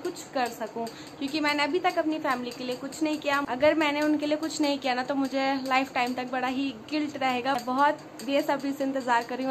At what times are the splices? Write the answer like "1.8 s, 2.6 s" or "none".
3.4 s, 7.6 s